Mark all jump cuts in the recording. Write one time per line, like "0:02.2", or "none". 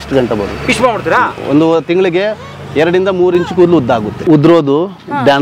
0:04.1